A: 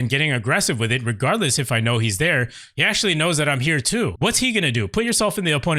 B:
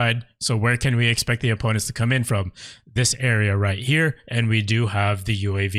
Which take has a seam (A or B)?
A